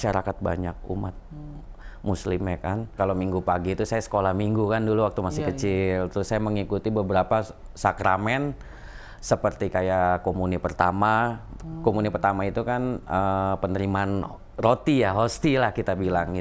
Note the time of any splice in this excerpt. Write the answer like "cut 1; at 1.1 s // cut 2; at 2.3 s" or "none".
cut 1; at 2.9 s